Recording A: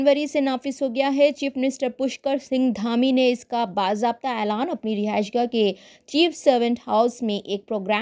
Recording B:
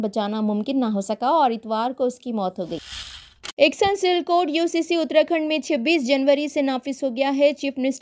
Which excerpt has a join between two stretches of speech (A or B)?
B